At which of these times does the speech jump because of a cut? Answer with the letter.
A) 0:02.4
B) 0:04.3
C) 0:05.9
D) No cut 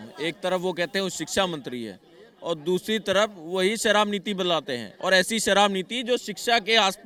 D